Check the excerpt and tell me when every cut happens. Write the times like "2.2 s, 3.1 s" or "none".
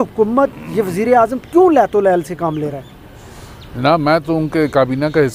none